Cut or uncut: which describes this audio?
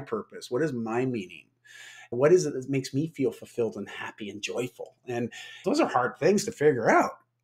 uncut